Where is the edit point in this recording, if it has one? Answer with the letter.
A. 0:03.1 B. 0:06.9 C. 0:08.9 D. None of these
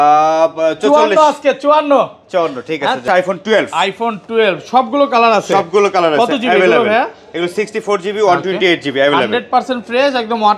A